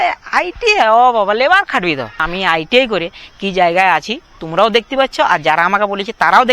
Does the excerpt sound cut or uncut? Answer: cut